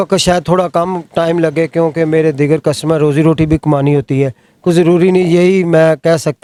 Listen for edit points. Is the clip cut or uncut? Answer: uncut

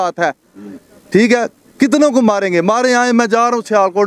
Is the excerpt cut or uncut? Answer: uncut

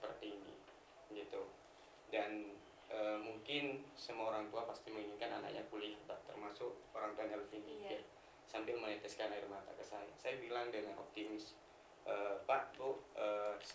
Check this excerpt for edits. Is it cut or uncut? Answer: uncut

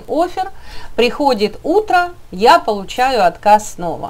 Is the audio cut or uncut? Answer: uncut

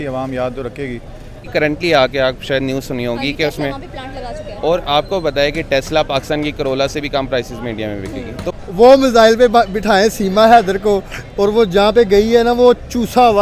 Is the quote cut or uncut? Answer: cut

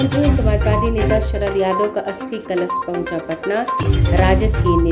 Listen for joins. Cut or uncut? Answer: uncut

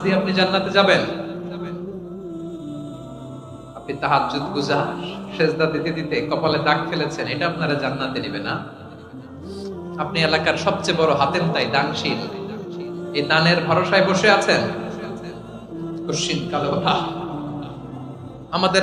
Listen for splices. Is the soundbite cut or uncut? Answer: uncut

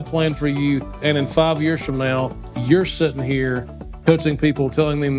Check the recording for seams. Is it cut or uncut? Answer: cut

